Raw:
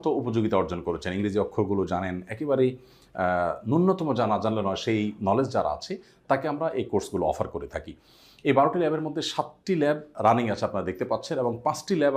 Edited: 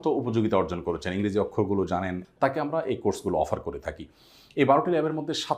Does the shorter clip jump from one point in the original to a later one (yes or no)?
yes